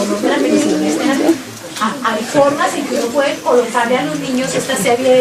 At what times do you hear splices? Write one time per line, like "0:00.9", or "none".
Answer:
0:02.9